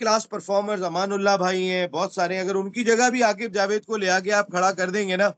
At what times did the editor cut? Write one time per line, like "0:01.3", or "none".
none